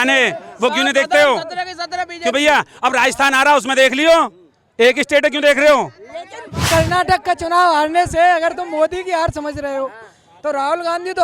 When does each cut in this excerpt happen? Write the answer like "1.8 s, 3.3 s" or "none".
6.6 s